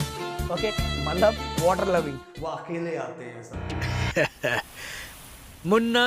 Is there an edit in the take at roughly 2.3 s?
yes; 1 cut; at 2.3 s

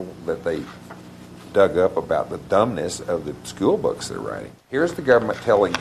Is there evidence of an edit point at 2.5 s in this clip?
no; 1 cut; at 4.6 s

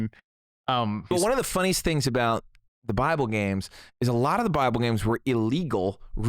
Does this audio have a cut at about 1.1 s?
yes; 1 cut; at 1.1 s

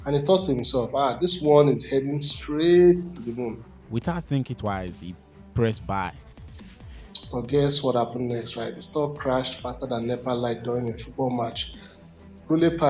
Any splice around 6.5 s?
yes; 2 cuts; at 3.7 s, 6.5 s

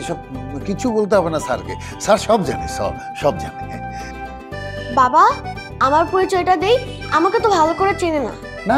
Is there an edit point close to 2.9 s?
no; 0 cuts

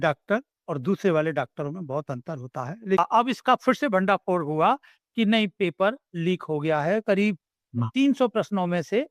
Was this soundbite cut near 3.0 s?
yes; 1 cut; at 3.0 s

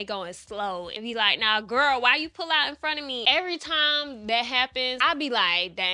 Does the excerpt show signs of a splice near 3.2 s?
yes; 3 cuts; at 0.9 s, 3.2 s, 5.0 s

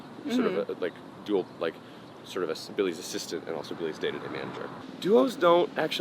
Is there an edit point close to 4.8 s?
yes; 1 cut; at 4.8 s

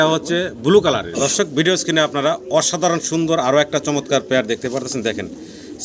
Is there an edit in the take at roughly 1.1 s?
yes; 1 cut; at 1.1 s

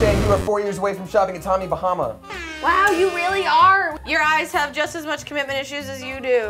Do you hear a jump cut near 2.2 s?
no; 1 cut; at 4.0 s

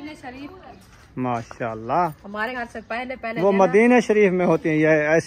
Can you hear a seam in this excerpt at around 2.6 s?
yes; 1 cut; at 2.6 s

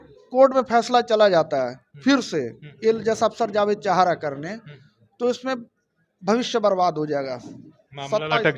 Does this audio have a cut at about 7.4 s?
no; 0 cuts

